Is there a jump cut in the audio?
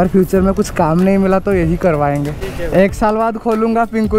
yes; 1 cut; at 2.4 s

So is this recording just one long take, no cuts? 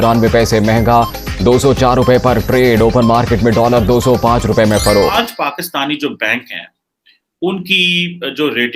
no; 1 cut; at 5.1 s

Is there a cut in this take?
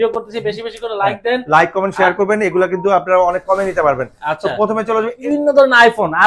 yes; 1 cut; at 5.1 s

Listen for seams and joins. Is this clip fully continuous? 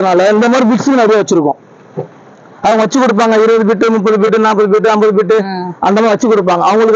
yes; 0 cuts

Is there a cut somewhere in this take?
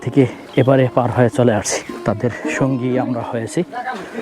yes; 1 cut; at 1.9 s

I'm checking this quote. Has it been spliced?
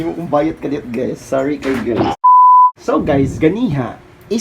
yes; 2 cuts; at 2.1 s, 2.8 s

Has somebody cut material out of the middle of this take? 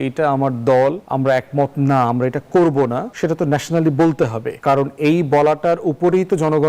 yes; 3 cuts; at 1.0 s, 3.1 s, 4.5 s

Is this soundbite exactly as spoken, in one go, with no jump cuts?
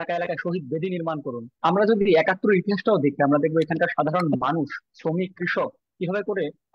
no; 1 cut; at 1.5 s

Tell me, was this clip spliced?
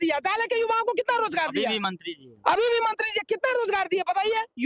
no; 0 cuts

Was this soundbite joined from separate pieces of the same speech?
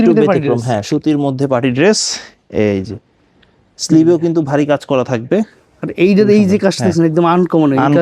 no; 0 cuts

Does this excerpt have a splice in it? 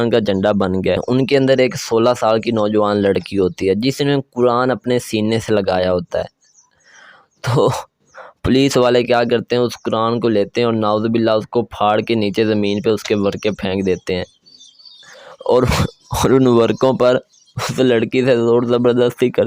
yes; 1 cut; at 1.0 s

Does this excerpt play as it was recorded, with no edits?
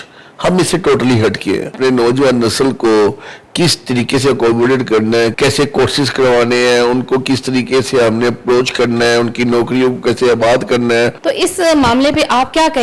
no; 3 cuts; at 1.7 s, 5.3 s, 11.2 s

